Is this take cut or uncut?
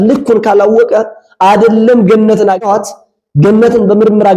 cut